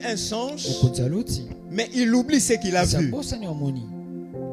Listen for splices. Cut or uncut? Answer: uncut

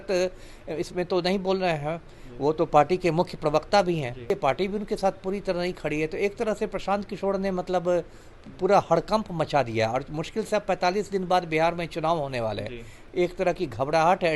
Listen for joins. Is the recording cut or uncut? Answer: cut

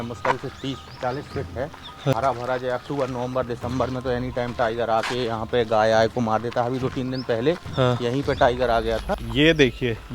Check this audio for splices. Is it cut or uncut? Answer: cut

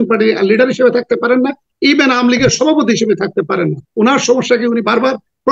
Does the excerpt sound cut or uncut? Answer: cut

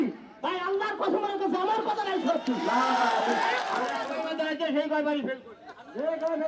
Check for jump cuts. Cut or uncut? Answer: cut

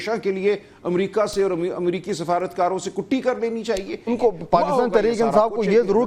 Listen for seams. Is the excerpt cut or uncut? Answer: uncut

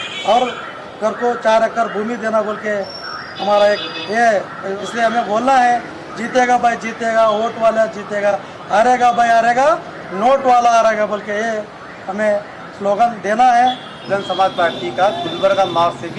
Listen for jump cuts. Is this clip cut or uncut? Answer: cut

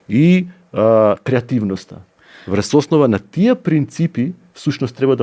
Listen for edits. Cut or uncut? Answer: uncut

